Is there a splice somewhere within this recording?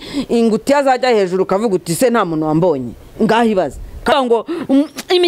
yes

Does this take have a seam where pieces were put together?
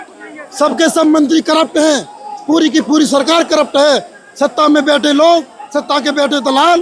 no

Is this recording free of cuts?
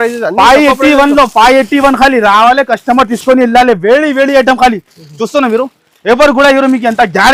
yes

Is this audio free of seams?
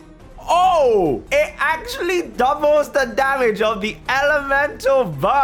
yes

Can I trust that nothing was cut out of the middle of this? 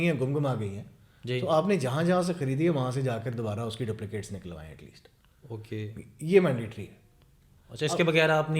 yes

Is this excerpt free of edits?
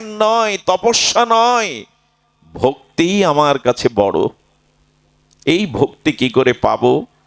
yes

